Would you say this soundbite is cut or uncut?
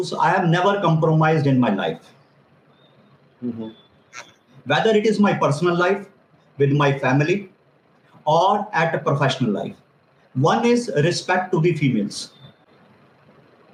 uncut